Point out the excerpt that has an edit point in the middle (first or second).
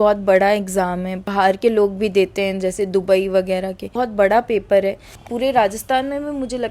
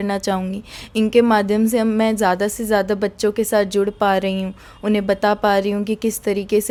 first